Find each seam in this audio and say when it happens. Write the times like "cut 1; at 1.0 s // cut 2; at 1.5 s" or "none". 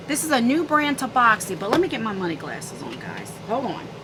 none